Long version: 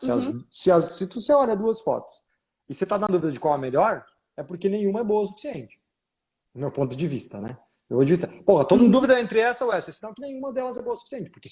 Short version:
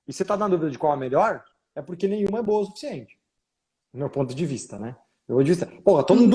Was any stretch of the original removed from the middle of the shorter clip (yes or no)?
no